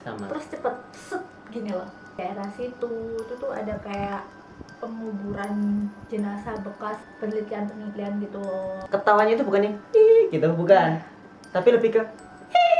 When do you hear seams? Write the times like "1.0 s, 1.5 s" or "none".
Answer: 2.2 s, 7.1 s, 8.8 s